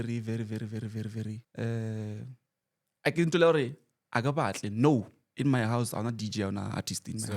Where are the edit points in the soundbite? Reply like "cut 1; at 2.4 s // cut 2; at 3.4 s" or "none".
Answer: cut 1; at 1.5 s